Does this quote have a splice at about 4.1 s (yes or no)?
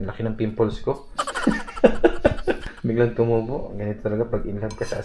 no